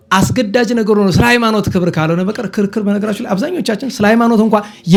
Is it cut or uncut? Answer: uncut